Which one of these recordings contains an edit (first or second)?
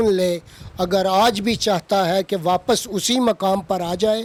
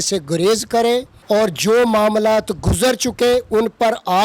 second